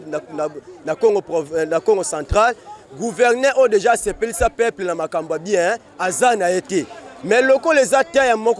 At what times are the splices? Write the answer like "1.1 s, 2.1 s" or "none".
none